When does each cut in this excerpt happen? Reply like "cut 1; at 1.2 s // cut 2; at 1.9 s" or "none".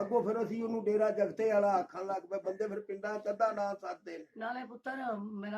none